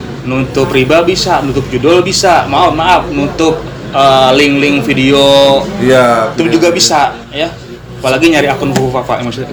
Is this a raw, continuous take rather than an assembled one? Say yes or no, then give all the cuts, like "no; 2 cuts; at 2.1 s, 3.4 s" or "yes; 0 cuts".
yes; 0 cuts